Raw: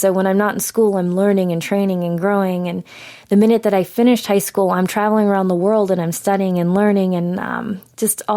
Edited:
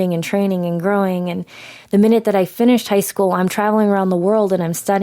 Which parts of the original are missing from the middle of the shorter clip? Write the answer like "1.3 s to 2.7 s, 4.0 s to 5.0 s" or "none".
none

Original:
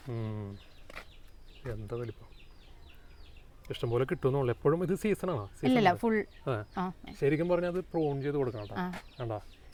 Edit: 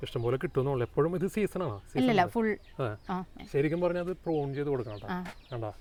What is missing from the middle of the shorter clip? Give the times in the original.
none

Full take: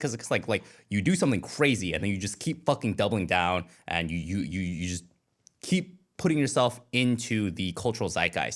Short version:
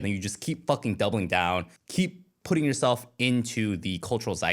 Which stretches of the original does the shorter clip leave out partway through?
3.8 s to 5.5 s

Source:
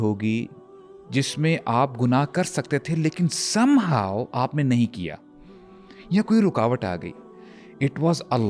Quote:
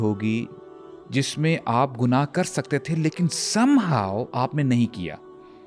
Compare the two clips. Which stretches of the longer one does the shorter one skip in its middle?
none

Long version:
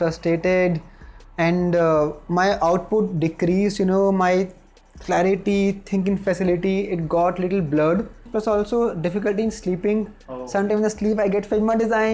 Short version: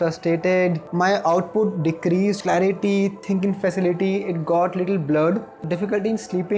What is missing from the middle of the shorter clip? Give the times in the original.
0.8 s to 2.2 s, 3.7 s to 5.0 s, 8.3 s to 9.0 s

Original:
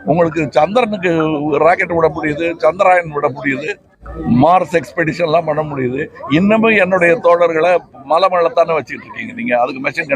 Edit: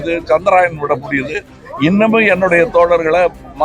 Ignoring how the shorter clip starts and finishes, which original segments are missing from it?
3.9 s to 6.1 s

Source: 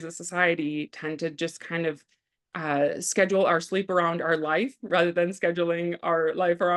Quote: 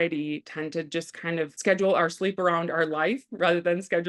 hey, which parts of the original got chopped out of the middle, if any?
2.0 s to 3.1 s

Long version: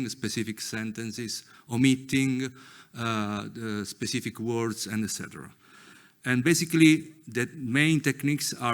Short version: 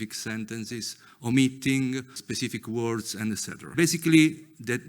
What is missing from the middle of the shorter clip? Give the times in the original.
2.7 s to 4.0 s, 5.5 s to 6.4 s

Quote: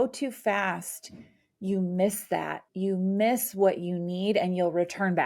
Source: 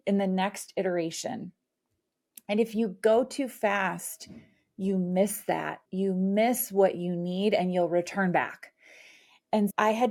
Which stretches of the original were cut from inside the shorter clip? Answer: none

